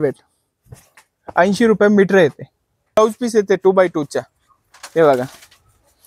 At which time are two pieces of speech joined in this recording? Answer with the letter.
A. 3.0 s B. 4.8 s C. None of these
A